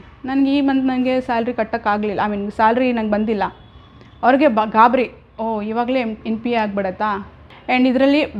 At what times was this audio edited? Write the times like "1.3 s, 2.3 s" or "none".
7.3 s